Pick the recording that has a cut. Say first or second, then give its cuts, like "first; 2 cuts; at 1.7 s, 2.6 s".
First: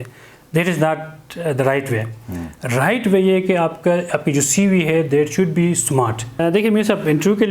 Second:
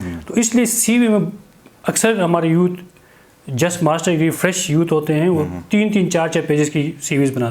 first; 1 cut; at 6.4 s